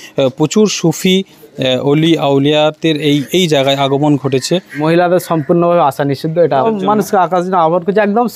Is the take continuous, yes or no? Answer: no